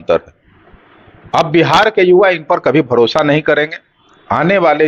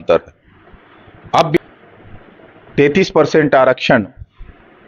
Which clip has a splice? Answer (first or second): second